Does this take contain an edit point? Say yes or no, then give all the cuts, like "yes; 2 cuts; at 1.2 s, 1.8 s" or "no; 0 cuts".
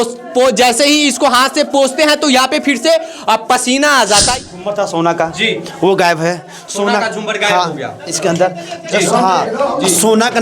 yes; 1 cut; at 4.3 s